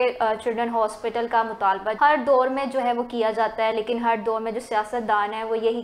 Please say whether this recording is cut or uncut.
cut